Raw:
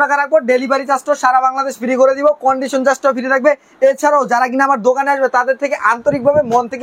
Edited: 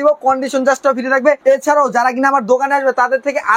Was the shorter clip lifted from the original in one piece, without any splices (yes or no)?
no